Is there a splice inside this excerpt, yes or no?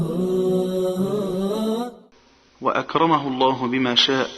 yes